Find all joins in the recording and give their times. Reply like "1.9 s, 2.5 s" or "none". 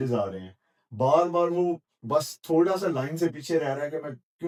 none